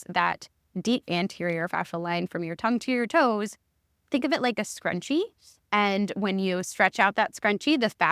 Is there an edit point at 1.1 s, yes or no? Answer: yes